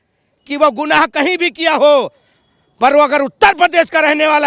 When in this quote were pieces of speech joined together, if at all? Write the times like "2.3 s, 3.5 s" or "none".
none